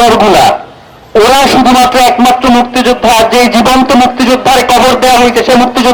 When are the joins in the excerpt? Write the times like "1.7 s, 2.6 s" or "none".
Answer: none